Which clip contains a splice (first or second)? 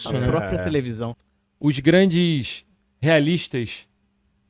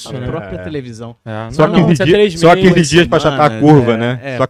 first